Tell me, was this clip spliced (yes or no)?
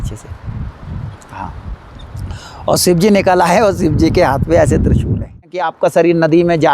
yes